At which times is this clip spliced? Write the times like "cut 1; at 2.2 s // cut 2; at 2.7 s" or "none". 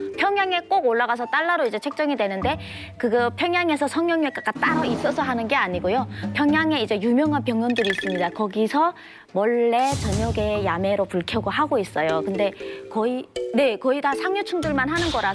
none